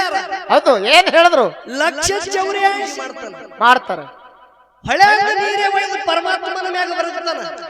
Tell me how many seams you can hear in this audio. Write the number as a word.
one